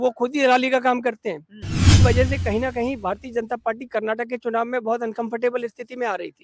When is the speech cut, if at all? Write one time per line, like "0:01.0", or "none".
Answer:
0:01.9